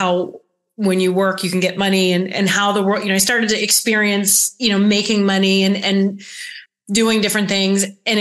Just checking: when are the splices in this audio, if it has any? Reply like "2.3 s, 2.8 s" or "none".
none

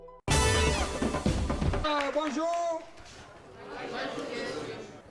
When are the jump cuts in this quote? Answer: 1.9 s

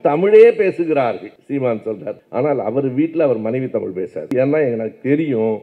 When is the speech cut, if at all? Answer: 4.3 s

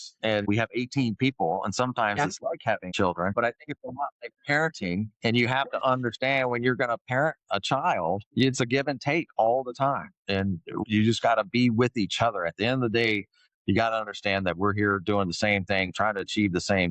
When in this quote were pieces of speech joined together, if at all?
none

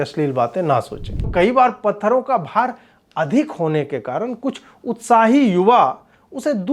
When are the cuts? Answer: 1.2 s

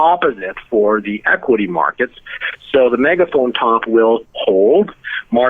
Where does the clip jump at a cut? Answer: none

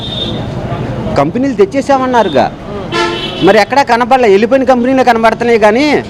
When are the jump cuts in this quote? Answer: none

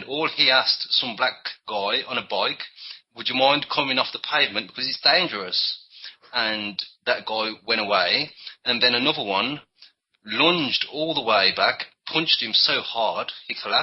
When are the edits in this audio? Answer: 4.5 s

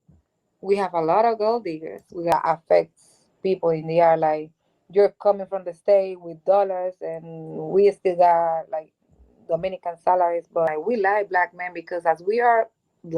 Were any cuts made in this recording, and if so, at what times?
2.3 s, 10.7 s

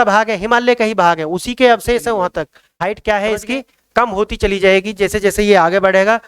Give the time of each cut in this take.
2.6 s

